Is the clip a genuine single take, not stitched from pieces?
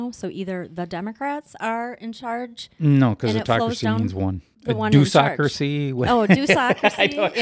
no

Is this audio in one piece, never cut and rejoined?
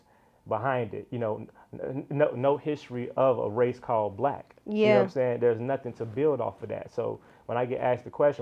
yes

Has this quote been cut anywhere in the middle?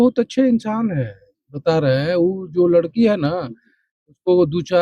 no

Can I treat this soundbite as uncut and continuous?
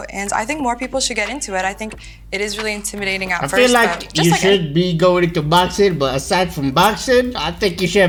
yes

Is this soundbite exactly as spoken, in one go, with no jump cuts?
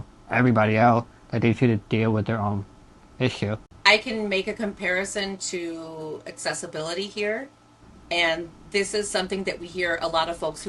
no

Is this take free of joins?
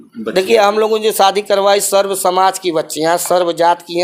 yes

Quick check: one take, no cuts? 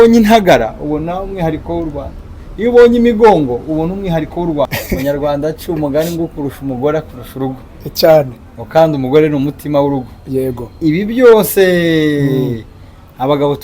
no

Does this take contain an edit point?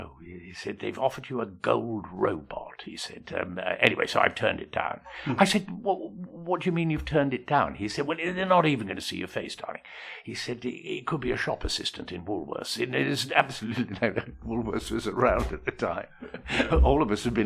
no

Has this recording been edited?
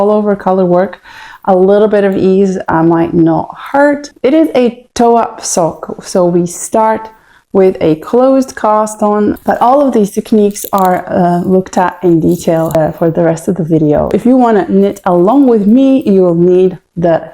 yes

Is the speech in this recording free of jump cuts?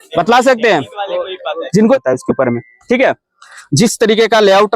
no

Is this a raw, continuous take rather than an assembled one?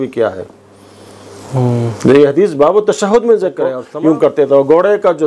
no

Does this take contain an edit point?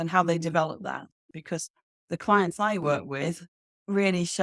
yes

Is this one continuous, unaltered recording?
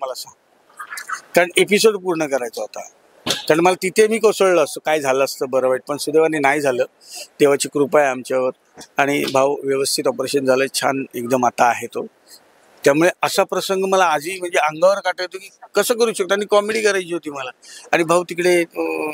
yes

